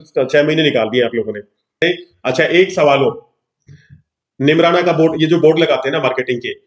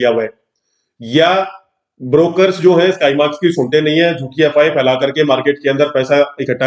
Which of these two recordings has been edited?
first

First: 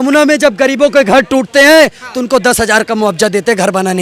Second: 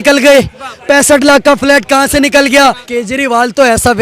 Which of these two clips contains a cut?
second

